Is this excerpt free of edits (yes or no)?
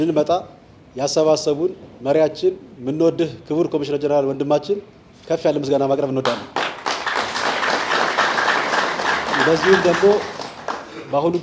yes